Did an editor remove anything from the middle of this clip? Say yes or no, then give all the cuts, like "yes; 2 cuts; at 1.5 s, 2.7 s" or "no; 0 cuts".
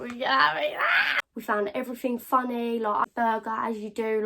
yes; 2 cuts; at 1.0 s, 3.0 s